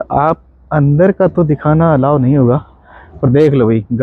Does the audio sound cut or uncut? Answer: uncut